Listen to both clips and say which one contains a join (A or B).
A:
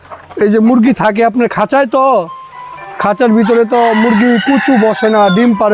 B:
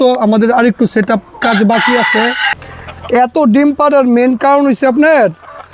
B